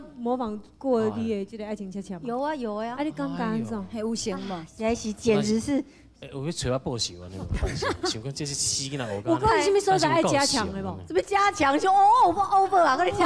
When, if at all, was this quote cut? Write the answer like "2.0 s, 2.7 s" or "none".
none